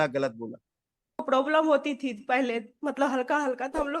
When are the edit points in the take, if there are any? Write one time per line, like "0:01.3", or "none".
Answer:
0:01.2